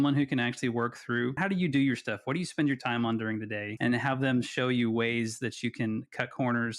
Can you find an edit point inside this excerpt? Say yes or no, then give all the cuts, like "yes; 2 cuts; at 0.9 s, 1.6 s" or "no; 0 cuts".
yes; 2 cuts; at 1.4 s, 3.6 s